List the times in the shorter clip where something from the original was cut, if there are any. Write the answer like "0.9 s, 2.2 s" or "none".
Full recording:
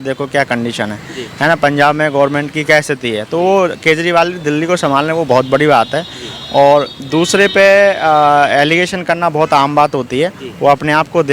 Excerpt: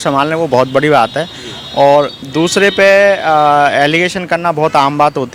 none